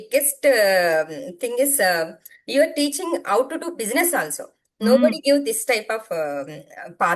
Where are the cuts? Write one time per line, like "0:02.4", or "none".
none